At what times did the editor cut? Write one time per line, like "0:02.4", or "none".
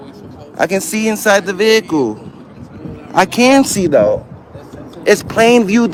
none